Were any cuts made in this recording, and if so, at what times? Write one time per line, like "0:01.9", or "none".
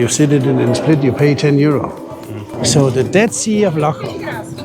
0:02.5